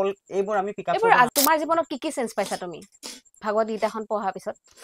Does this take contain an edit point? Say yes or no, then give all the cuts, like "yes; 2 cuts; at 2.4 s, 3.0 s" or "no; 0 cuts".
yes; 1 cut; at 1.3 s